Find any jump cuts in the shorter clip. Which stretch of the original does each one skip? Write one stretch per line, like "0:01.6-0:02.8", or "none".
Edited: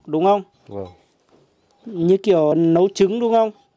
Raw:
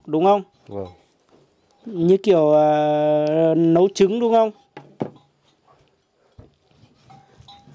0:02.5-0:03.5